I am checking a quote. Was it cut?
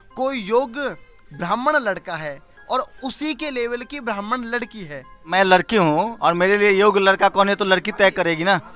yes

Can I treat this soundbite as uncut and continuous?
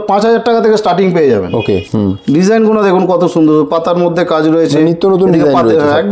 no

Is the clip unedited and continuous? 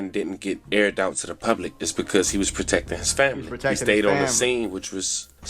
yes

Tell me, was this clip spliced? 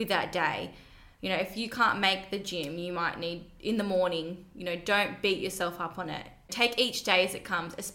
no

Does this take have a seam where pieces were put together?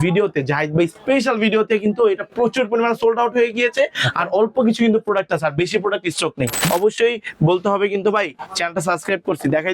yes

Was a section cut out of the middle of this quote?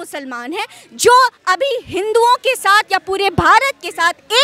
no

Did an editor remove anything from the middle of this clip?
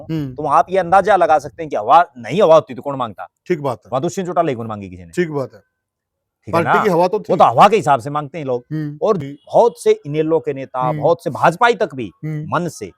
yes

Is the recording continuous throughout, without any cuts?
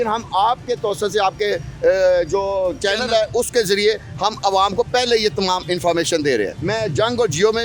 no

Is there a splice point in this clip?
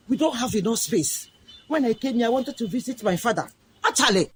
no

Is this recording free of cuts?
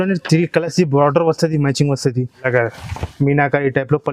no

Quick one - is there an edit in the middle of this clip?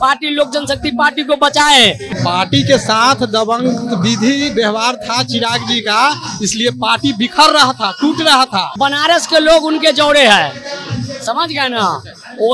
yes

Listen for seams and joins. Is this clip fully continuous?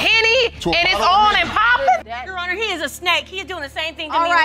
no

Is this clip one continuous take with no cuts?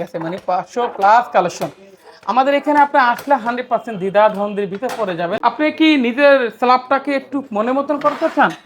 no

